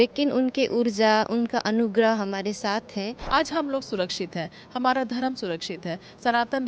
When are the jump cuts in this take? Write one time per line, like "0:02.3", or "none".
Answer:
0:03.2